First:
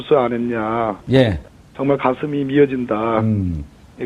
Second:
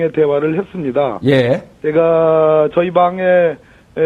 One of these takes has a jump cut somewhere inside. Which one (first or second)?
second